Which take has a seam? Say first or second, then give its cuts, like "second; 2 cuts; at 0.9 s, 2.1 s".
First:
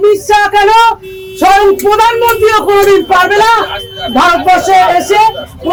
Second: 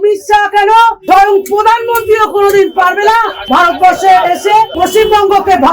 second; 3 cuts; at 1.0 s, 3.4 s, 4.8 s